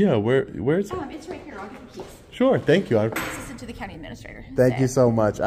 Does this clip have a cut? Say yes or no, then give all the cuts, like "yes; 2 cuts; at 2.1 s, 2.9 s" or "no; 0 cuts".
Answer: yes; 1 cut; at 3.2 s